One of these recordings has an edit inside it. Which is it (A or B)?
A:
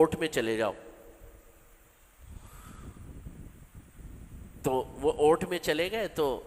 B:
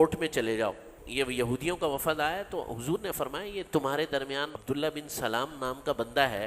B